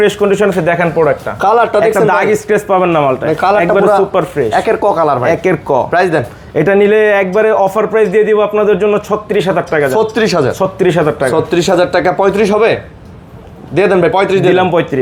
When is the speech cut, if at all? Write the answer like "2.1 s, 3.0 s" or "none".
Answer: none